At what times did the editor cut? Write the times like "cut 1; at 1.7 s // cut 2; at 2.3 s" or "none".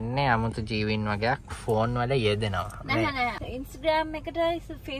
cut 1; at 3.3 s